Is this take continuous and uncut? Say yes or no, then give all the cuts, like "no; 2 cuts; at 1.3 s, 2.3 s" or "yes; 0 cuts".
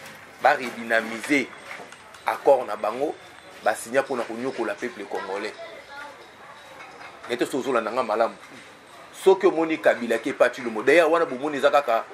yes; 0 cuts